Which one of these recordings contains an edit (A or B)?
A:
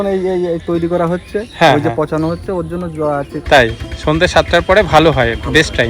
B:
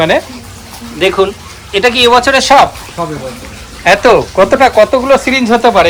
A